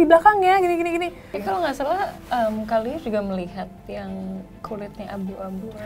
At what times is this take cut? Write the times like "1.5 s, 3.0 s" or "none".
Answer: 1.3 s